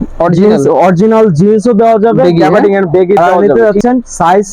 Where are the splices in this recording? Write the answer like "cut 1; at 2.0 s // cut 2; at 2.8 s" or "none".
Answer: cut 1; at 3.2 s